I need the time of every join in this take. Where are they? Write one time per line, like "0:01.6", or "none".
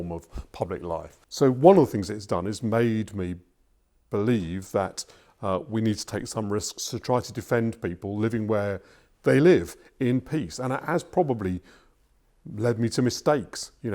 0:01.2